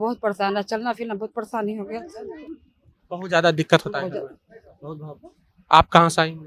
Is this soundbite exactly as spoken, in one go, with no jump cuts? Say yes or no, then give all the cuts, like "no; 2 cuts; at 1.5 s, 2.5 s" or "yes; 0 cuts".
yes; 0 cuts